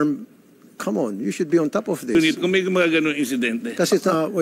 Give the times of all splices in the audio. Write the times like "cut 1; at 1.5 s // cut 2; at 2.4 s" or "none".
cut 1; at 2.1 s

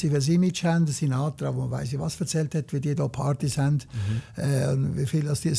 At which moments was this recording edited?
none

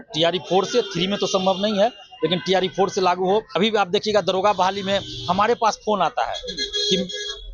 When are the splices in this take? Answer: cut 1; at 3.5 s

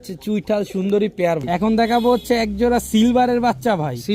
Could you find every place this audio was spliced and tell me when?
cut 1; at 1.5 s

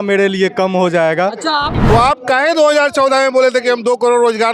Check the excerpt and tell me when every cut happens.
cut 1; at 1.8 s

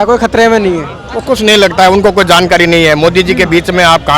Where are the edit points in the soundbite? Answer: cut 1; at 1.0 s

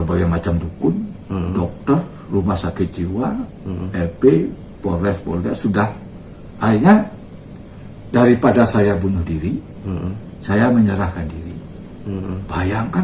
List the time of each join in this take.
none

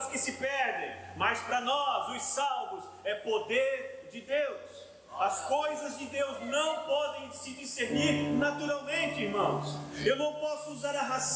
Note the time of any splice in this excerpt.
none

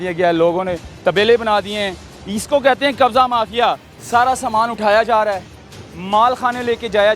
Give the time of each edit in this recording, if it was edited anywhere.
cut 1; at 3.9 s

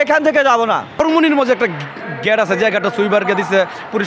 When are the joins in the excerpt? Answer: cut 1; at 1.0 s

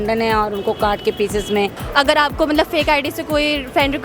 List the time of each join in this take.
cut 1; at 1.8 s

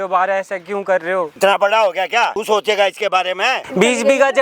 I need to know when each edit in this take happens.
cut 1; at 1.3 s // cut 2; at 2.4 s // cut 3; at 3.6 s

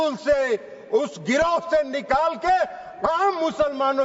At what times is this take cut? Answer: none

